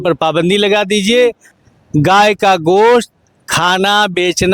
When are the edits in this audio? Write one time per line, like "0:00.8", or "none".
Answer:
0:01.5